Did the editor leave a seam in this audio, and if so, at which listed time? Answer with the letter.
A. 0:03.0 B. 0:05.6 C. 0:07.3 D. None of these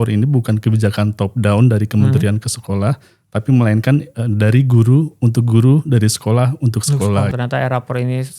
C